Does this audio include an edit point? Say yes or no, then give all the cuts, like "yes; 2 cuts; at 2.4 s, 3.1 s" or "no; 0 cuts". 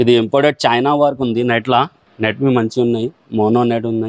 yes; 1 cut; at 2.0 s